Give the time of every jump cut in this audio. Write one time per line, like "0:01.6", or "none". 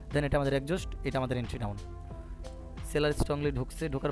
0:02.4

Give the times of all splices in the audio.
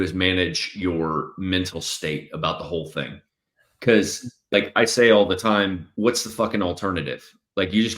0:04.4
0:05.8

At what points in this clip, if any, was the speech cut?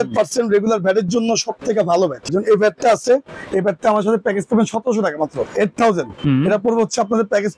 0:02.3
0:05.4

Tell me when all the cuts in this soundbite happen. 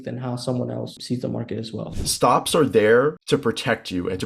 0:01.0
0:01.9
0:03.2

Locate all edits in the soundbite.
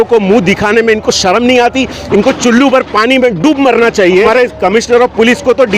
0:04.3

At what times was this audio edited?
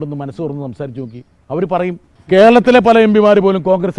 0:02.1

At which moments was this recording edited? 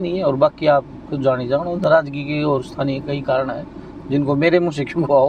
none

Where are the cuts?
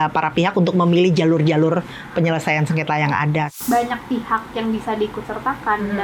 0:03.5

